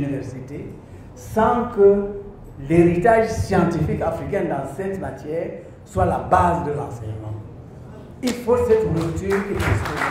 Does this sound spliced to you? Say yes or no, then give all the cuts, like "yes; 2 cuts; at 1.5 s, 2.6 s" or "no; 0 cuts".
no; 0 cuts